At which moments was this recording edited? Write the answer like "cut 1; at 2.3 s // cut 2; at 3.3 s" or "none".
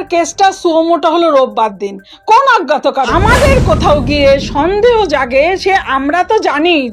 cut 1; at 3.1 s